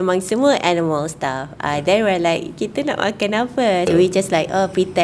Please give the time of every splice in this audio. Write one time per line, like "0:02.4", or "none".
0:03.9